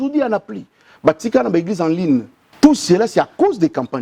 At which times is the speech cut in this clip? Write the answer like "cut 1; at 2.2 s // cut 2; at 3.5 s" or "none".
cut 1; at 2.4 s